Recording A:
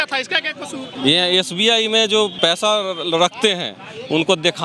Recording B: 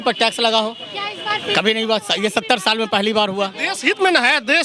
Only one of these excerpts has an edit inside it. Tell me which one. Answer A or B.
A